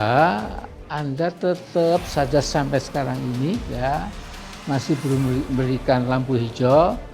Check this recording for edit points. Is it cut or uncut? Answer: uncut